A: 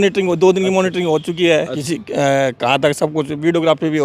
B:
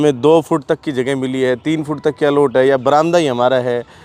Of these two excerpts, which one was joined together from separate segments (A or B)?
A